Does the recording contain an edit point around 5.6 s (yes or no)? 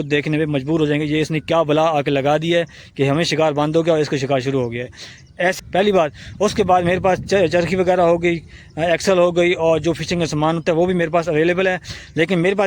yes